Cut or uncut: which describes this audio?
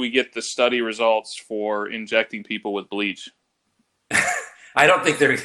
uncut